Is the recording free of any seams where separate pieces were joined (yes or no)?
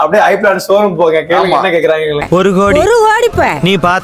yes